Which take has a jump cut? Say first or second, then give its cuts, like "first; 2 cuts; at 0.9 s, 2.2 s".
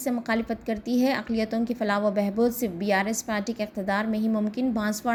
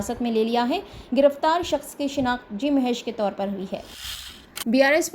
second; 1 cut; at 3.9 s